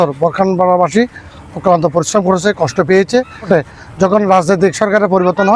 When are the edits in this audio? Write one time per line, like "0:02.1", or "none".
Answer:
0:03.5